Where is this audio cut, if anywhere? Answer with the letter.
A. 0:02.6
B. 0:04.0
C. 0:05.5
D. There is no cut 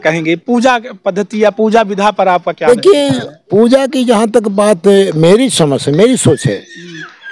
A